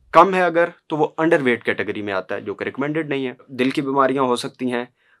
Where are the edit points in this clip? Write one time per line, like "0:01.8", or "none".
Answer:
0:03.4